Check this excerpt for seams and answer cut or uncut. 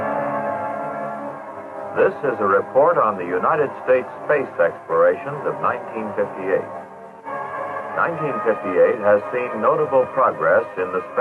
uncut